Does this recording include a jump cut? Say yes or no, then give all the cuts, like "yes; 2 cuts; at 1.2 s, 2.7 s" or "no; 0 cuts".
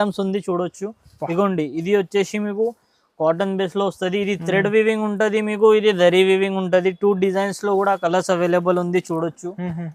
no; 0 cuts